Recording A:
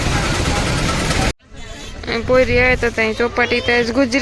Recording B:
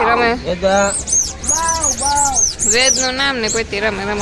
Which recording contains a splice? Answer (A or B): A